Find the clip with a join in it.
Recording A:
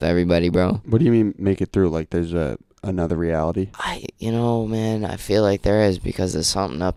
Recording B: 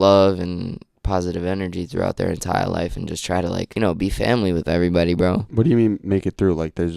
B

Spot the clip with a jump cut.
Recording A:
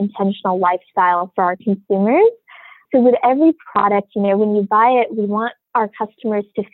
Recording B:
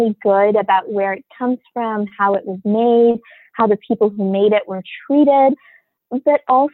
A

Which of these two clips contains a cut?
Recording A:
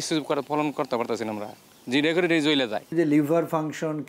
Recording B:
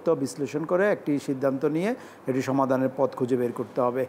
A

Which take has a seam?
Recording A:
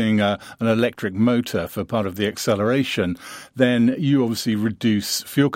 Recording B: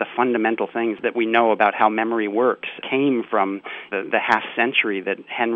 B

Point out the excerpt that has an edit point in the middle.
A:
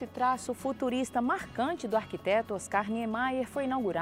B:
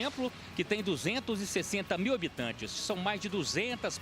B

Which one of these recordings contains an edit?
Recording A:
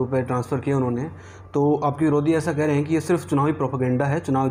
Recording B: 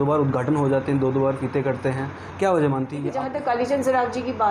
B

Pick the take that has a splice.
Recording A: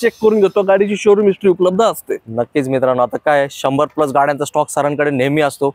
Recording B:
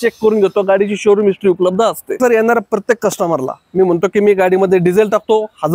B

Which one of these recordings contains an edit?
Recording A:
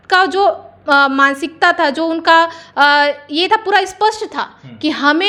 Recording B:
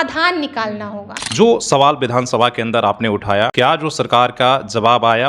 B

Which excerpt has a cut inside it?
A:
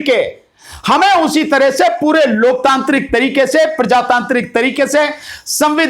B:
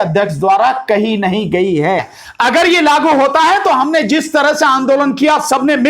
B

